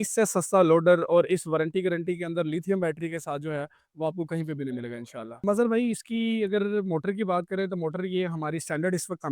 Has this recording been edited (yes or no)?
yes